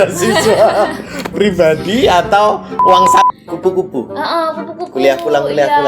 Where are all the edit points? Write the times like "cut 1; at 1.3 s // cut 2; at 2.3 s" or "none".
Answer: cut 1; at 3.3 s